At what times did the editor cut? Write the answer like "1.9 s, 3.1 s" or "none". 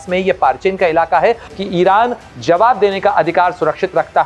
1.5 s